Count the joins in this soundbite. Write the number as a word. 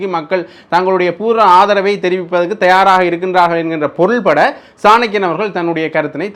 zero